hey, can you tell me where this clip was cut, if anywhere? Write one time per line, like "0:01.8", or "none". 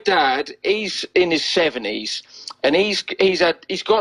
none